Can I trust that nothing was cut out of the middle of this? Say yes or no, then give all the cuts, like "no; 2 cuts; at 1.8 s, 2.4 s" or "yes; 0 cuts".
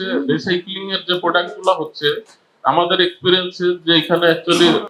yes; 0 cuts